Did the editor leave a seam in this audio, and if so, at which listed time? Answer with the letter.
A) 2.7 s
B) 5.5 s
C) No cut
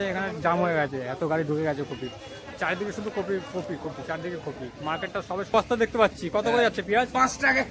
B